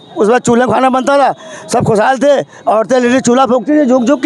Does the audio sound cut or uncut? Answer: uncut